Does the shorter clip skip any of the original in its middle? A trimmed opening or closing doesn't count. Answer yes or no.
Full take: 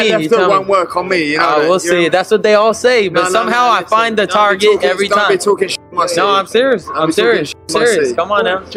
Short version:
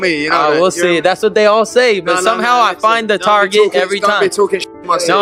no